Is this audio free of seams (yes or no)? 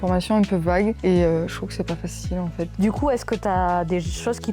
no